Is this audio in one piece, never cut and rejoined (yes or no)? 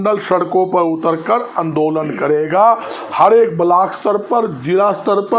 yes